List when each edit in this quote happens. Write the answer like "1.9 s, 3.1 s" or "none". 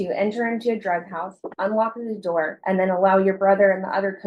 none